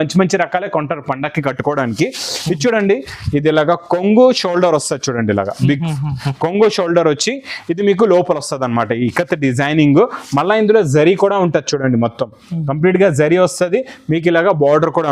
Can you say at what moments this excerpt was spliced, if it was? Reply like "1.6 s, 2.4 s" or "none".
none